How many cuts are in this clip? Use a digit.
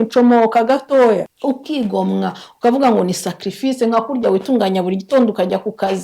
1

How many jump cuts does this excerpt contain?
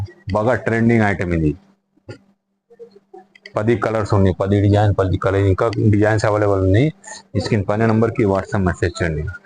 0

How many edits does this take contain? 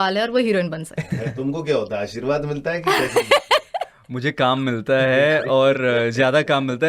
1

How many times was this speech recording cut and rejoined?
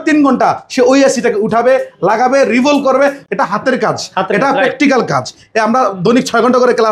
1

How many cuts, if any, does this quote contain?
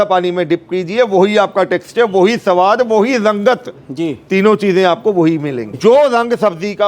1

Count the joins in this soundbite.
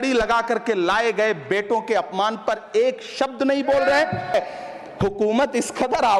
1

